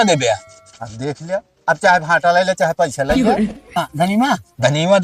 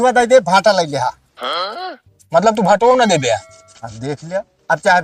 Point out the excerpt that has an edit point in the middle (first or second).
first